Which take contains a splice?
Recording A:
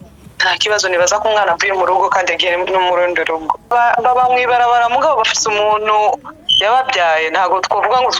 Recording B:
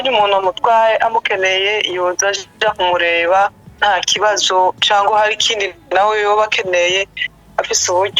A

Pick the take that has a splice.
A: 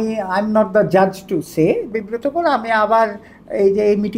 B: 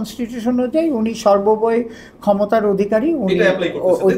A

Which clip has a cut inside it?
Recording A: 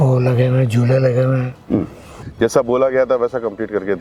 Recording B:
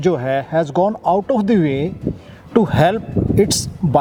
A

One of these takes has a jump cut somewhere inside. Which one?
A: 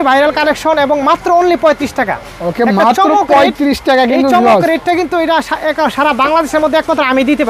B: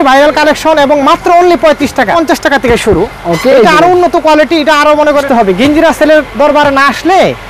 B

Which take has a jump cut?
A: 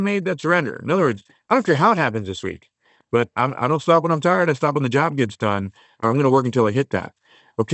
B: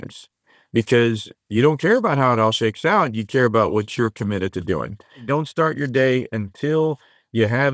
B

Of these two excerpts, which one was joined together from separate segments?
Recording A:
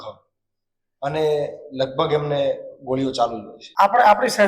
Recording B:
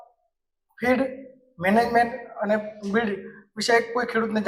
A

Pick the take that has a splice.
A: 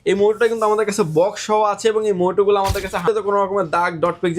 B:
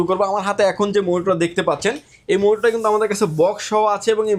A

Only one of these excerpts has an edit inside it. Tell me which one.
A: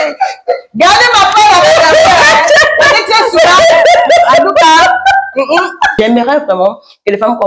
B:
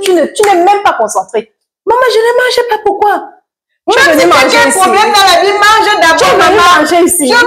A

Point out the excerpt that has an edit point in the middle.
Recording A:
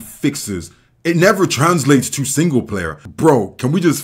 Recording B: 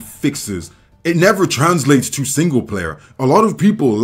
A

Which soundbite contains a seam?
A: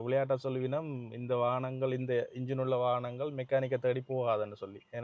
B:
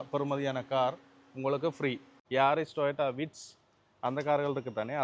B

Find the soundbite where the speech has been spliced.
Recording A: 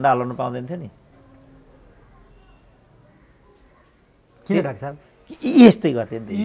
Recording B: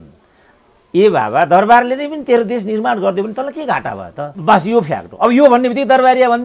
B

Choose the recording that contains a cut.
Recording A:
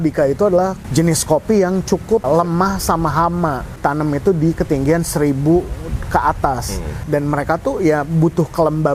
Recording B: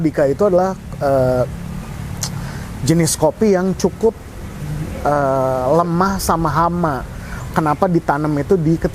A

